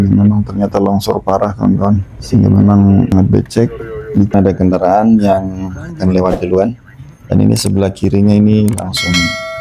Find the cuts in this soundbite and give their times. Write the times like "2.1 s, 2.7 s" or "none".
4.3 s